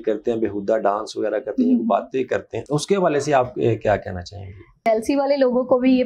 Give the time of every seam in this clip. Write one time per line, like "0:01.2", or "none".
0:04.8